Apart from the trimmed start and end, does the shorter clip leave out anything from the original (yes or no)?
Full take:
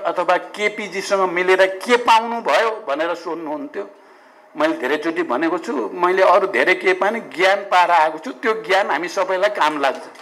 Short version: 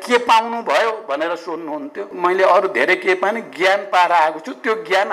yes